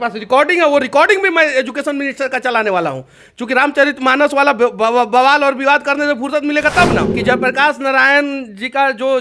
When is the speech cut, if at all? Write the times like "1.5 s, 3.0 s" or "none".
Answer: 7.2 s